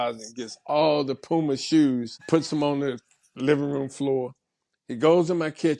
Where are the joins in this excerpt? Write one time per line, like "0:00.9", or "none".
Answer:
0:02.1